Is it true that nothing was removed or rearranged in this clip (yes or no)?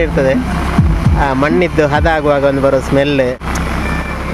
no